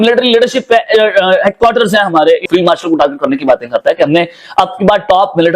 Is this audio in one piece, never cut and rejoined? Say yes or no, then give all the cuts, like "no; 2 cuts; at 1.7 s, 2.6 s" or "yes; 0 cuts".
no; 1 cut; at 2.4 s